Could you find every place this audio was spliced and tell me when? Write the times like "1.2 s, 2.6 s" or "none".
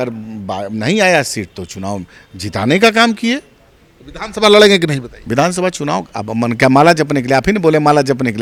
none